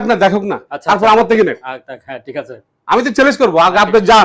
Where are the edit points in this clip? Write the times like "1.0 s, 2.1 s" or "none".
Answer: none